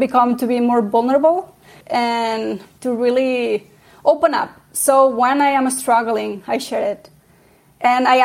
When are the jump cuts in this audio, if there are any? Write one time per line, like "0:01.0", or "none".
0:01.8
0:02.7